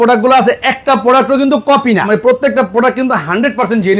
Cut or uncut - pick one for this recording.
cut